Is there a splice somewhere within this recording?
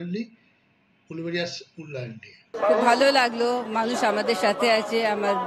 yes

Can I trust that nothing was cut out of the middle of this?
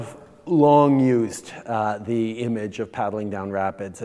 yes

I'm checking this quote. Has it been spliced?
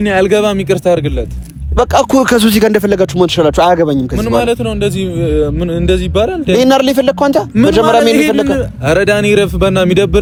no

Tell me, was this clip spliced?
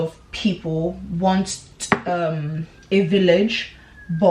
no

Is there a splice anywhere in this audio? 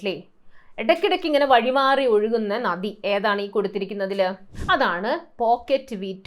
yes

